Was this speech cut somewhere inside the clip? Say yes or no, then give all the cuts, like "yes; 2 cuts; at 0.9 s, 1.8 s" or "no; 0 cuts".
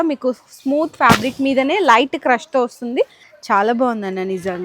yes; 1 cut; at 3.2 s